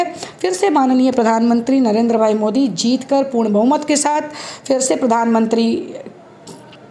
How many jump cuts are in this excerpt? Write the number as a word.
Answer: zero